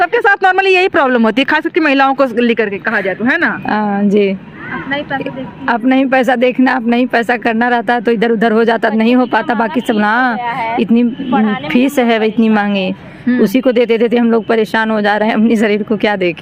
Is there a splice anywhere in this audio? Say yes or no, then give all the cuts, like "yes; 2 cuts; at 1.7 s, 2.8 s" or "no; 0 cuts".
no; 0 cuts